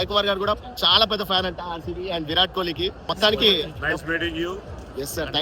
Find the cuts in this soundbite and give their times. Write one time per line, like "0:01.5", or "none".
0:03.0

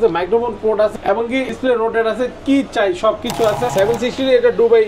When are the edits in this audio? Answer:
0:01.5
0:03.7

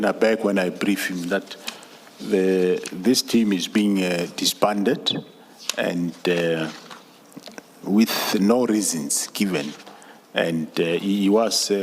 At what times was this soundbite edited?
none

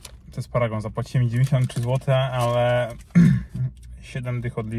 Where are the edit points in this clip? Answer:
none

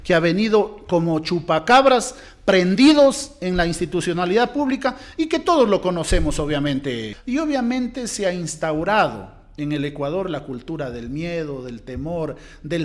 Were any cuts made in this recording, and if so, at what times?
0:07.1

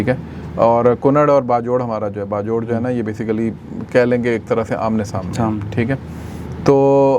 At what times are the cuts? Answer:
none

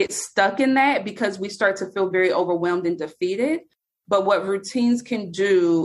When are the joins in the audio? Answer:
none

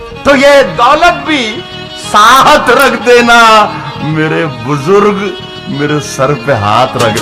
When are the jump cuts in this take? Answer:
none

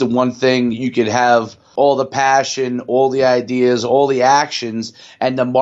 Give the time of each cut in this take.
0:01.7

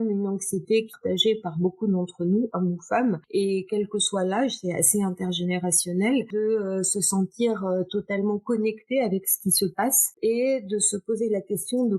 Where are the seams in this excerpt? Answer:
0:00.9
0:03.2
0:06.3
0:10.2

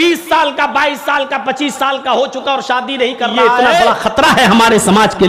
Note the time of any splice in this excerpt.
0:03.8

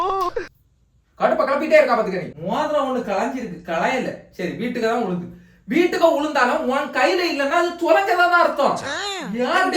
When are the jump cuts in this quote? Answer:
0:01.0
0:02.3

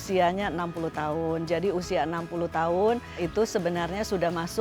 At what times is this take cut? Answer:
0:03.2

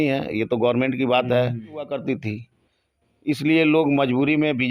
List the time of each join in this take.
0:02.0

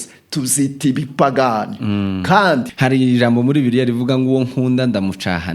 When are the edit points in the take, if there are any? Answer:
0:02.7

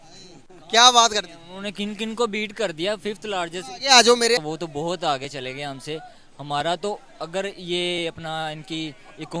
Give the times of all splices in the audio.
none

